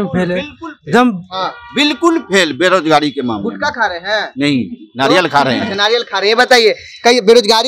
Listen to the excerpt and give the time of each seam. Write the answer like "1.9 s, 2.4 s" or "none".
none